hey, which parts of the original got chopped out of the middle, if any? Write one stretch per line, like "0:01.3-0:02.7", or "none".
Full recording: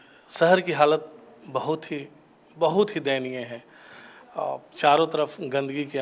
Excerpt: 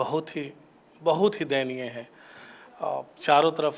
none